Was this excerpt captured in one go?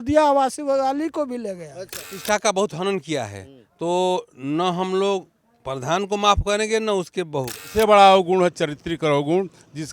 no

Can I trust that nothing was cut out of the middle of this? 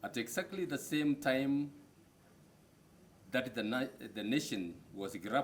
yes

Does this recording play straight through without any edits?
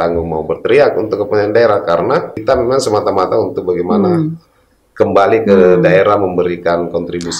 no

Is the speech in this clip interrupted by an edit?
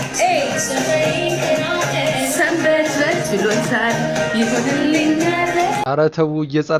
no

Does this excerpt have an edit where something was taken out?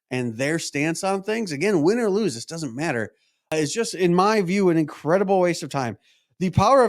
yes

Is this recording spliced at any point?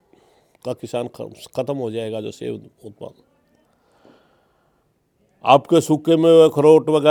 no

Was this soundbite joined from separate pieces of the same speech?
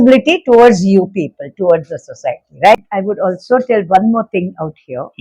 yes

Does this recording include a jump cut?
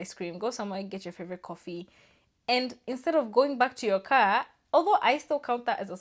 no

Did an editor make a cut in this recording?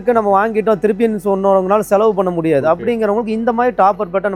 no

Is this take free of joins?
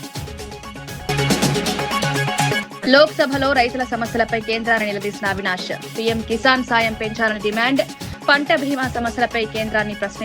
no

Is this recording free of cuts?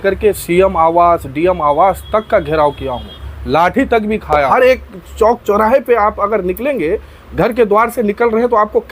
no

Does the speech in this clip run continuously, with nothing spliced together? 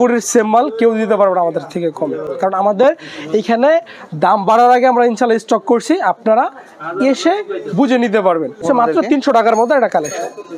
yes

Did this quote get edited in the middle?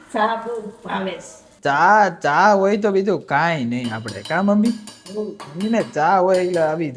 no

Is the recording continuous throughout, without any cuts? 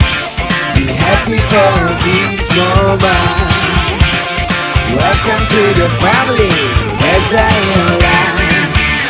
yes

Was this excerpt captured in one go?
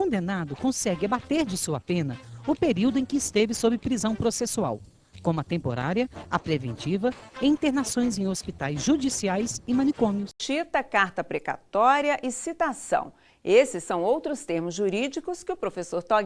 no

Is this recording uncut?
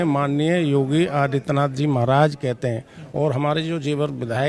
yes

